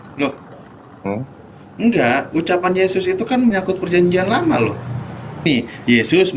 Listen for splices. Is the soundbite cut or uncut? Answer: cut